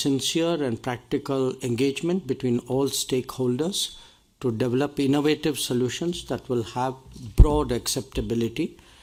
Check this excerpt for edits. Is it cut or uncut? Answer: uncut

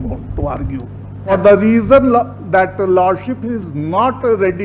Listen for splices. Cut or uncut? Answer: cut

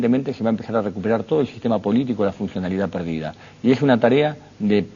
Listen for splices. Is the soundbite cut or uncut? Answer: uncut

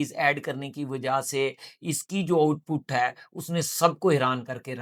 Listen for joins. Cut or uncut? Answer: uncut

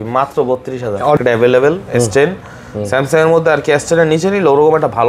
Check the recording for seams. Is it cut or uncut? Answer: cut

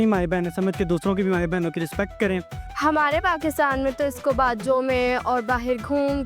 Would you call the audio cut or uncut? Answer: cut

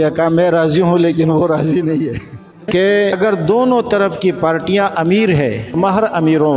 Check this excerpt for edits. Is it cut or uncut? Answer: cut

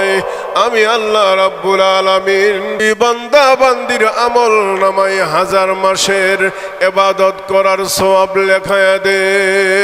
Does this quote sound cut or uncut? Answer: cut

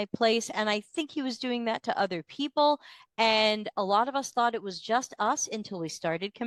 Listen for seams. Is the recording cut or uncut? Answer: uncut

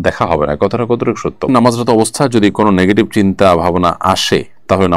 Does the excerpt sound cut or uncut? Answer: cut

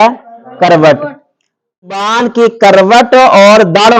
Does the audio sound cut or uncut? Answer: cut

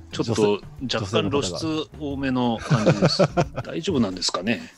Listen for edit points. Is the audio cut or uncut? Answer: cut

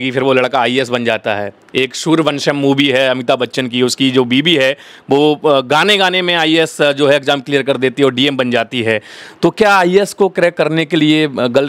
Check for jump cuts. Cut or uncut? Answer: uncut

